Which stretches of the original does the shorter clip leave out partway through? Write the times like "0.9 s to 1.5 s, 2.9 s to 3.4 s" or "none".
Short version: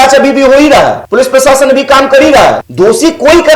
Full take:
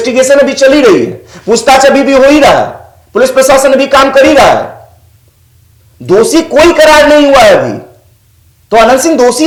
2.7 s to 3.1 s, 4.7 s to 6.0 s